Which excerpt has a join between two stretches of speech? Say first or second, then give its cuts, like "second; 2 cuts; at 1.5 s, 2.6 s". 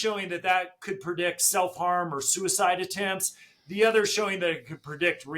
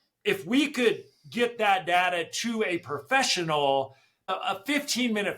second; 1 cut; at 4.3 s